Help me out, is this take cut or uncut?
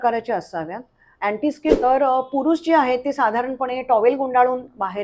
cut